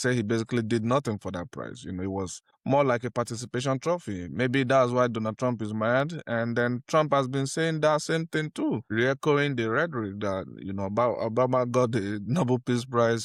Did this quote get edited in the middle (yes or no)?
no